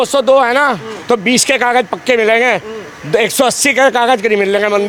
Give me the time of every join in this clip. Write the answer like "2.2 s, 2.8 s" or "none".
none